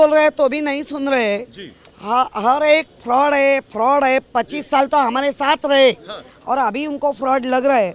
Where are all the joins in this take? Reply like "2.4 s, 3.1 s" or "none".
none